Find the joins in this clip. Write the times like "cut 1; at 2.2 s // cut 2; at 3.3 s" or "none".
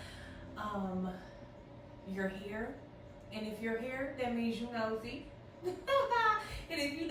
none